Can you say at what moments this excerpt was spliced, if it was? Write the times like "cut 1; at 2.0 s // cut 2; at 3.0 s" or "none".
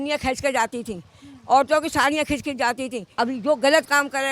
cut 1; at 3.0 s